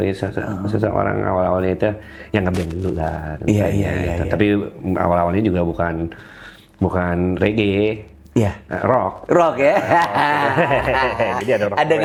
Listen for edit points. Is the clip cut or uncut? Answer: uncut